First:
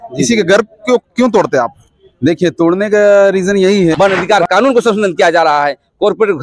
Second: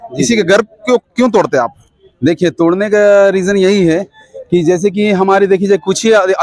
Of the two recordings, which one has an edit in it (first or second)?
first